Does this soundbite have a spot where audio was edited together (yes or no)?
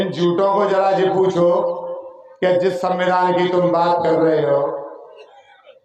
no